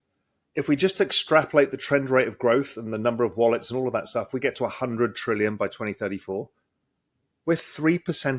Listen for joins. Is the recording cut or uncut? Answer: uncut